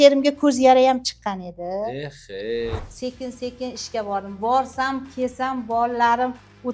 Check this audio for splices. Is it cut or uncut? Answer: cut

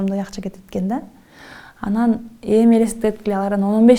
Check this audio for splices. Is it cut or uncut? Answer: uncut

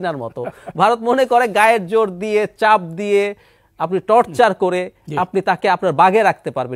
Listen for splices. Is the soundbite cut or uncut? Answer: uncut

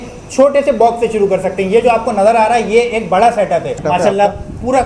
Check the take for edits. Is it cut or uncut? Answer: cut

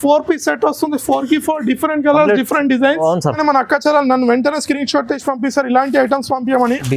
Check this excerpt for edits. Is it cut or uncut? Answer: cut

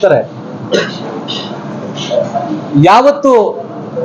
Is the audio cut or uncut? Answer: uncut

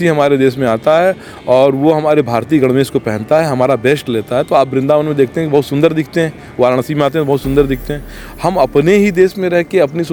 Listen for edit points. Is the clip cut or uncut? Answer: uncut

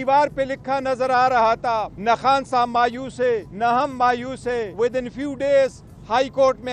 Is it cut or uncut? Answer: cut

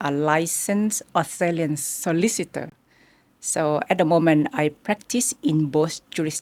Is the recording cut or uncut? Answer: uncut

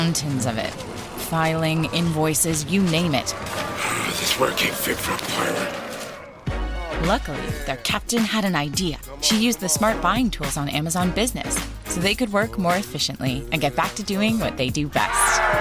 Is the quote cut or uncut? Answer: uncut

